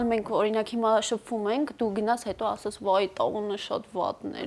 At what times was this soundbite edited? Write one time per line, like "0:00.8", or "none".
none